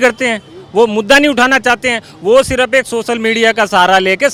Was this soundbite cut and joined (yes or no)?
no